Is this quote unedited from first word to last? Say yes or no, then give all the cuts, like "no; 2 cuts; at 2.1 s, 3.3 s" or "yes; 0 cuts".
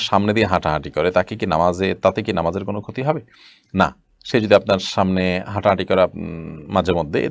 yes; 0 cuts